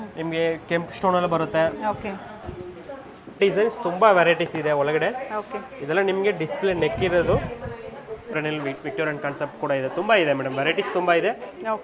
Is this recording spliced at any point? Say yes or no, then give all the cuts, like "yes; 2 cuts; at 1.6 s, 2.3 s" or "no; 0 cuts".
yes; 2 cuts; at 3.4 s, 8.3 s